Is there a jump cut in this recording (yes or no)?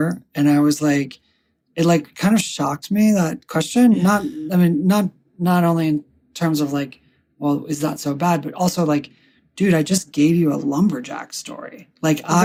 no